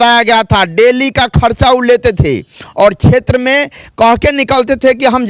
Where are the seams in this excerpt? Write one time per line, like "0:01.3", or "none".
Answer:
none